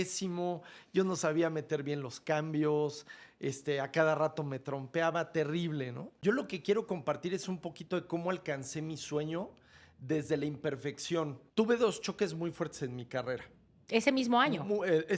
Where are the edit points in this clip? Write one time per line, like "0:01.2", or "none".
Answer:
0:06.0
0:11.4